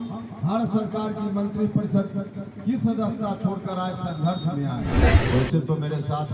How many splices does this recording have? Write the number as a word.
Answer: one